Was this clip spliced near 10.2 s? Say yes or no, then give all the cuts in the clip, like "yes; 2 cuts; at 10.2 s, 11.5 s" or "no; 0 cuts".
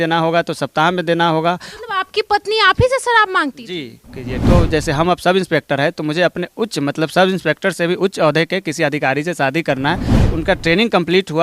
yes; 2 cuts; at 4.4 s, 10.2 s